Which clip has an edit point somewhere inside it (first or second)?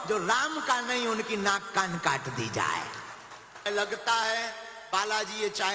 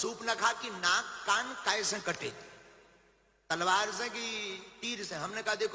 first